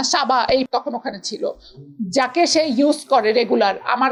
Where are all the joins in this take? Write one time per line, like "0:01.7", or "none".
none